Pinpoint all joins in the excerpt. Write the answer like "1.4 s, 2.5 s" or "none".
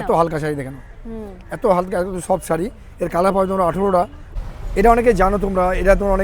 4.2 s